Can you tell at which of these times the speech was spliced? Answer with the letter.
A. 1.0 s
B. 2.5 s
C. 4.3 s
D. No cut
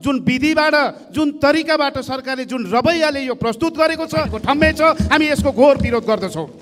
C